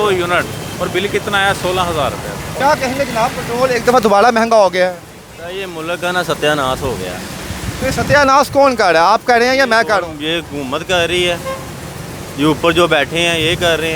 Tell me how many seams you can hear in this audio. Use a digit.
0